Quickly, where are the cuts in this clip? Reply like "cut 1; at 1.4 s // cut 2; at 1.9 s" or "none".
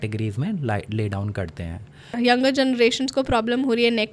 cut 1; at 2.1 s